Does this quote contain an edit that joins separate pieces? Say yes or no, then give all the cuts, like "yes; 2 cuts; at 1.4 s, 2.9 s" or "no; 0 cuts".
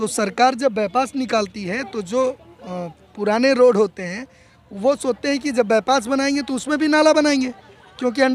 no; 0 cuts